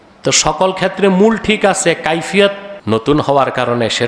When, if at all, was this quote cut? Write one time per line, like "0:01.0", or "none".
0:02.7